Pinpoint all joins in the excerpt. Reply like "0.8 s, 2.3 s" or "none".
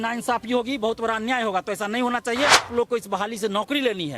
2.6 s